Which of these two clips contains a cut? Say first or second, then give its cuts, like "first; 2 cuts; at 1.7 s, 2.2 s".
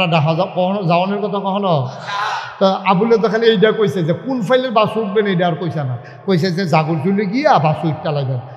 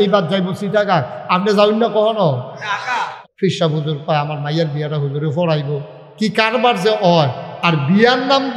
second; 1 cut; at 3.2 s